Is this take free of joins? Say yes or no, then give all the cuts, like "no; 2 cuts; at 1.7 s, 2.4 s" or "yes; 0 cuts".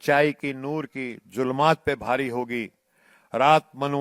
yes; 0 cuts